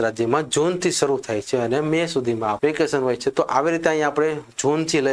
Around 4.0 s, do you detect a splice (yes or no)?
no